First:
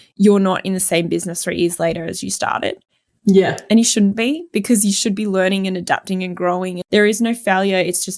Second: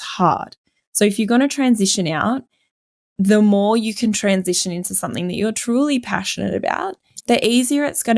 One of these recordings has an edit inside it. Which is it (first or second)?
first